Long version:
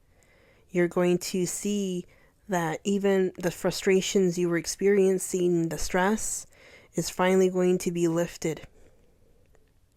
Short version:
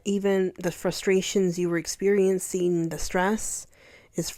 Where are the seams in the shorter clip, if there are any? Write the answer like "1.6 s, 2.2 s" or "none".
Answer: none